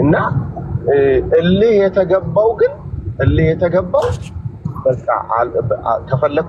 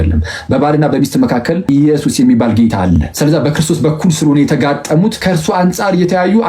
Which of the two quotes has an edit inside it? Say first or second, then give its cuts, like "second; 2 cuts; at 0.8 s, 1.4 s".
second; 3 cuts; at 1.6 s, 3.1 s, 5.2 s